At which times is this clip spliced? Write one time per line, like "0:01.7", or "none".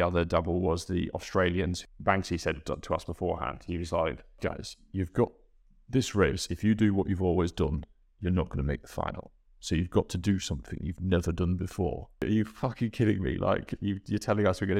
0:01.8
0:04.4
0:12.2